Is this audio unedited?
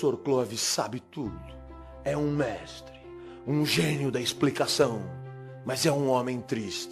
yes; 0 cuts

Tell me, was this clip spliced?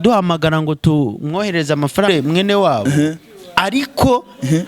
yes; 1 cut; at 2.1 s

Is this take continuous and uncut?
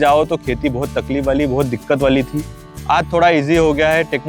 yes; 0 cuts

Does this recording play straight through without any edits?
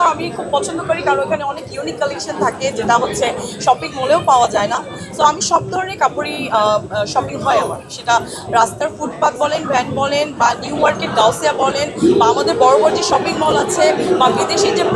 yes; 0 cuts

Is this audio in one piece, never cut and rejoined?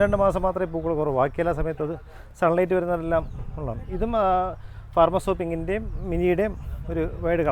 yes; 0 cuts

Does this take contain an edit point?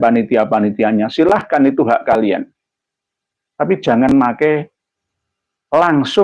no; 0 cuts

